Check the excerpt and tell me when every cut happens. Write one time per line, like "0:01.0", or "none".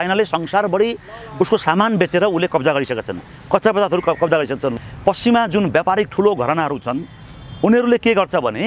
0:04.7